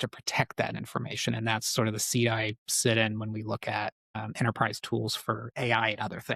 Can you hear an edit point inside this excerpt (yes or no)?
no